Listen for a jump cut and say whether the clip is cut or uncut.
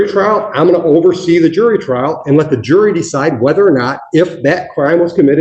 uncut